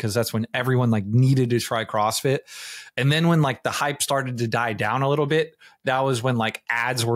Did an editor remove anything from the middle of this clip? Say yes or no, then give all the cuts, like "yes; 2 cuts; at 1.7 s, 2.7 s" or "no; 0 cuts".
no; 0 cuts